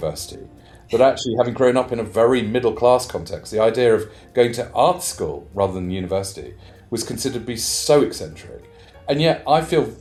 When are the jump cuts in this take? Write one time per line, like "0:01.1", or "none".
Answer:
none